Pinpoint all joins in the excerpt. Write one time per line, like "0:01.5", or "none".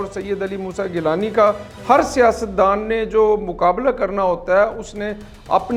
none